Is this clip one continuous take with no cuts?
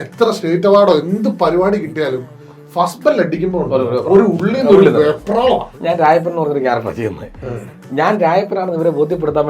no; 1 cut; at 5.7 s

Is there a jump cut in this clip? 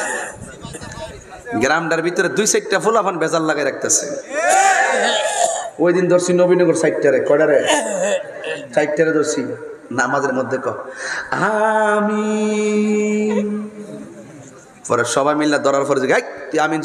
no; 0 cuts

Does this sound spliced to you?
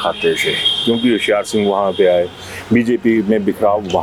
no; 0 cuts

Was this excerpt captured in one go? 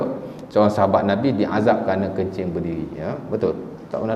yes; 0 cuts

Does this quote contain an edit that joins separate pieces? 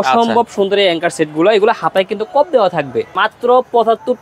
yes; 1 cut; at 3.1 s

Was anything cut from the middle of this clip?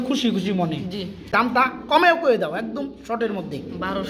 yes; 1 cut; at 1.3 s

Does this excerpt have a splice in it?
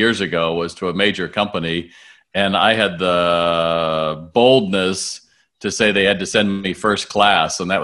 no; 0 cuts

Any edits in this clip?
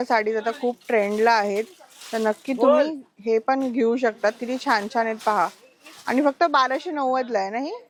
no; 0 cuts

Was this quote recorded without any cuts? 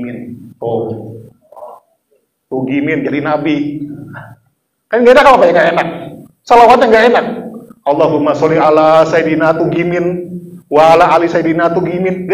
yes; 0 cuts

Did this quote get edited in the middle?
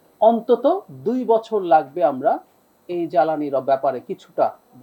no; 0 cuts

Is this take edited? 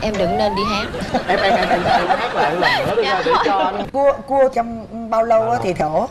yes; 1 cut; at 3.9 s

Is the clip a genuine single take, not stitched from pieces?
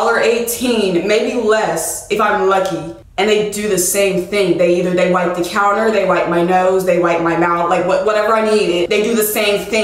yes; 0 cuts

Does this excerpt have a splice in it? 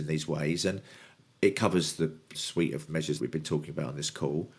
yes; 2 cuts; at 2.4 s, 3.2 s

